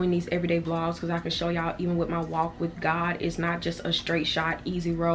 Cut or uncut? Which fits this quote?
uncut